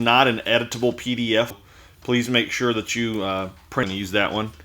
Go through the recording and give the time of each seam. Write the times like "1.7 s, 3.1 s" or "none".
1.6 s, 3.8 s